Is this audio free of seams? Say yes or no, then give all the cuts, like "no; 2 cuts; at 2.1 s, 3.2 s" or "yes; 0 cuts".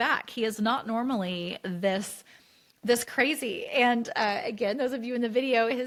yes; 0 cuts